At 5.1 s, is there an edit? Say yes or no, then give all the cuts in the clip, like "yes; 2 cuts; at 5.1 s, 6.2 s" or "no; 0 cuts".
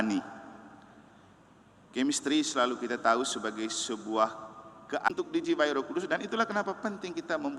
yes; 1 cut; at 5.1 s